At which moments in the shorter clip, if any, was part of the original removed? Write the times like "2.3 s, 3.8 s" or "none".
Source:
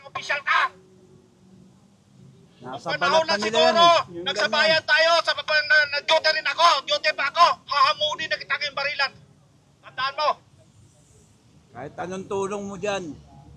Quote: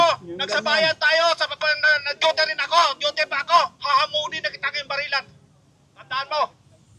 none